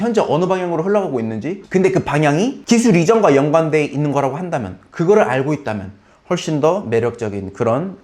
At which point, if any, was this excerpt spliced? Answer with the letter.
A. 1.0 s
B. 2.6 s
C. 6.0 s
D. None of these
B